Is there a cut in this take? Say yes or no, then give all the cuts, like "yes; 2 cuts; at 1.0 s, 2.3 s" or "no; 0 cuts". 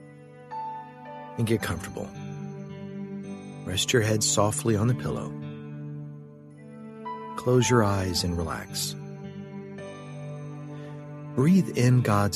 yes; 4 cuts; at 2.1 s, 3.6 s, 5.2 s, 7.0 s